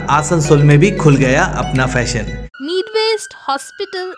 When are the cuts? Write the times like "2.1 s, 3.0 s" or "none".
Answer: 2.5 s